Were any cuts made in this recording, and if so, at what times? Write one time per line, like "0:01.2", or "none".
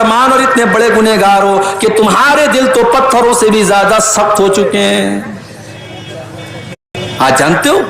0:07.0